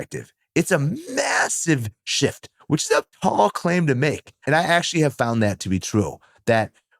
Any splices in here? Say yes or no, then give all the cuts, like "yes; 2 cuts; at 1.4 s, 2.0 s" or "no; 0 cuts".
yes; 1 cut; at 4.3 s